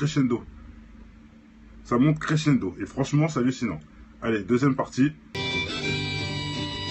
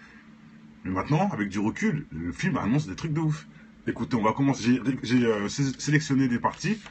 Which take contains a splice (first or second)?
first